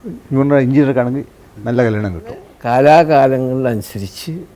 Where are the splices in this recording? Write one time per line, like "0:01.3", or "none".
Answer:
0:02.5